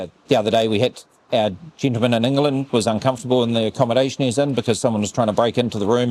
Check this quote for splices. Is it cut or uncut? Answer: uncut